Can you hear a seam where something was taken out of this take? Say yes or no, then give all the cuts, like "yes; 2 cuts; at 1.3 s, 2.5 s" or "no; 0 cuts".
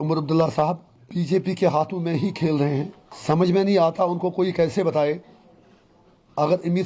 yes; 2 cuts; at 1.0 s, 3.1 s